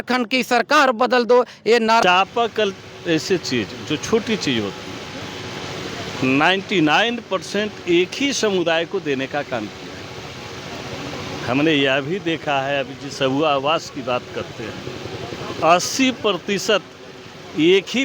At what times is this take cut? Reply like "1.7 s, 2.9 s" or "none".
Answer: 2.0 s